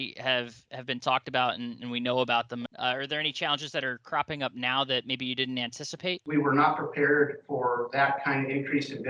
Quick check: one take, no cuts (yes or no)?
no